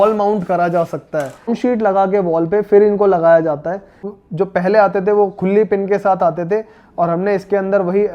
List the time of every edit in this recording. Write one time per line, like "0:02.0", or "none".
0:01.5
0:04.1